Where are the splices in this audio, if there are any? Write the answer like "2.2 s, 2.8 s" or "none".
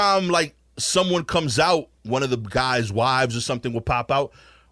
2.0 s